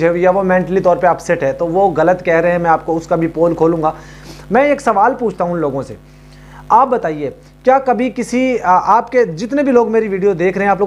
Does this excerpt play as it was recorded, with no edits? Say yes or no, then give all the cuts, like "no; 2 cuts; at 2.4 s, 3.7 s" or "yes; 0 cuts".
yes; 0 cuts